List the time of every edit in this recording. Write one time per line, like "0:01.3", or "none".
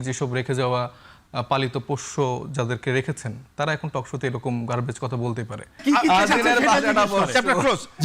0:05.8